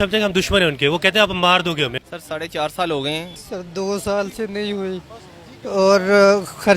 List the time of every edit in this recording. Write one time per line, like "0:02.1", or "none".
0:02.0
0:03.4